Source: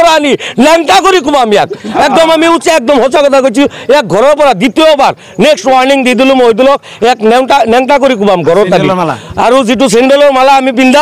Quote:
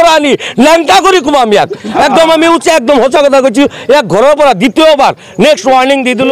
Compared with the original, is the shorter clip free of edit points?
yes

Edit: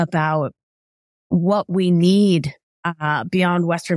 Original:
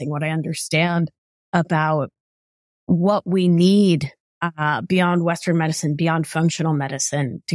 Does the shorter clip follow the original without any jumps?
yes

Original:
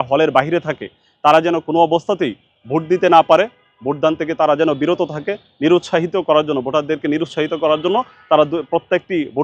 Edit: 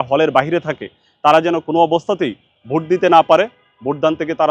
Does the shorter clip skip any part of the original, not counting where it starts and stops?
no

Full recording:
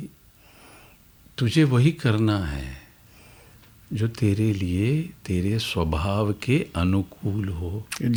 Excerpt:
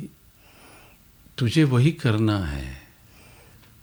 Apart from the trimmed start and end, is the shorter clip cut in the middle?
no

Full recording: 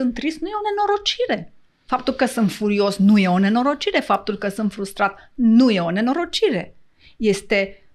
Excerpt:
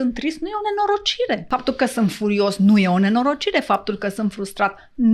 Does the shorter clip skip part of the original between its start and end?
yes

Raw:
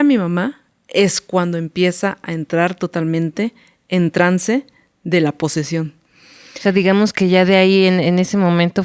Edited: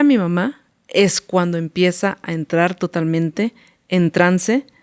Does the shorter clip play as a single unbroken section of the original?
yes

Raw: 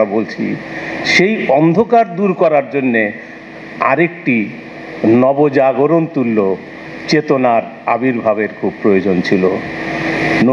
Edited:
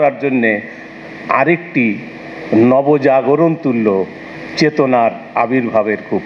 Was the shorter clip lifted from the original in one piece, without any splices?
yes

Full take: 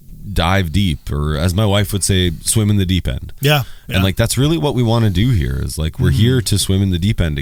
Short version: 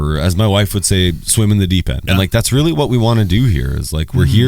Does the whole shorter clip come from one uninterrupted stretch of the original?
no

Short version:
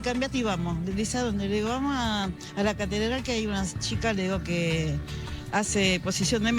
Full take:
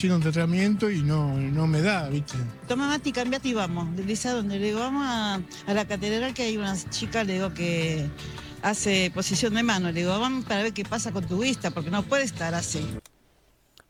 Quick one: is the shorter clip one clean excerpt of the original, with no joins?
yes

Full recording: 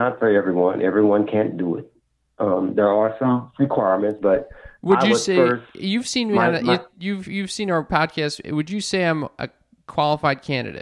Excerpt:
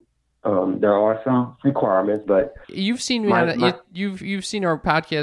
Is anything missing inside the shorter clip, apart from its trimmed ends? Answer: yes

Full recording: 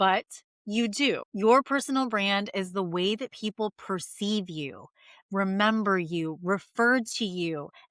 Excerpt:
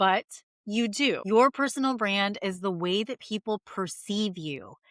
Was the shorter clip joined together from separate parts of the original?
yes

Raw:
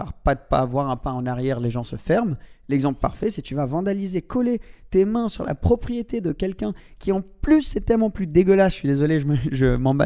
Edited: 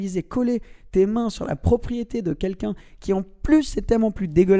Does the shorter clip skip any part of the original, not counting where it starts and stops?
no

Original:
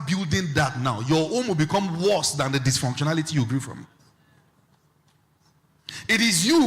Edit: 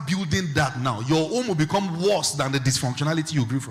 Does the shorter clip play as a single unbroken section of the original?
yes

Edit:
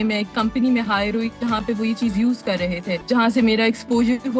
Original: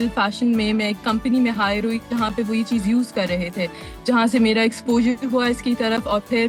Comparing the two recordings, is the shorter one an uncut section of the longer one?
no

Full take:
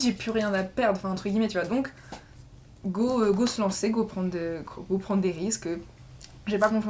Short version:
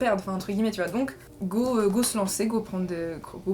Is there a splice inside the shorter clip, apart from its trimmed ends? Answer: yes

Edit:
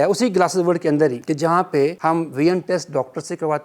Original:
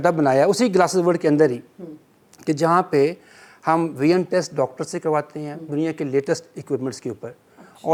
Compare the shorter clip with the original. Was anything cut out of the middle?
yes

